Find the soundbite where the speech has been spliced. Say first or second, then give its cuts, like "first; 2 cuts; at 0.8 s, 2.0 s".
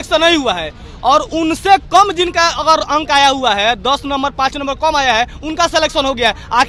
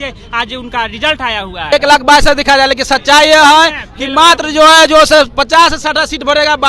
second; 1 cut; at 1.7 s